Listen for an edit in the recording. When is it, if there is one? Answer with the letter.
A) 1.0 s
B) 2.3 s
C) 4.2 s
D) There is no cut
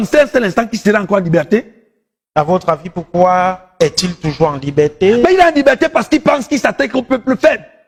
D